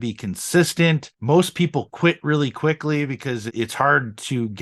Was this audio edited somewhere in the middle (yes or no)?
yes